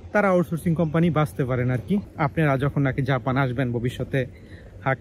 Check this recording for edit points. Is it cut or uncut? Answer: cut